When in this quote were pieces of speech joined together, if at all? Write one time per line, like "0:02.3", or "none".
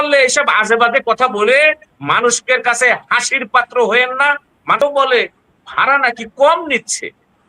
0:04.8